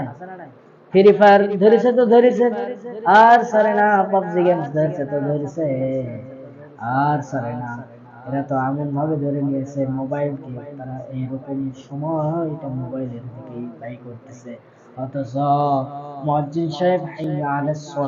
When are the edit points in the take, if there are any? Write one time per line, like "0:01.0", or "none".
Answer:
none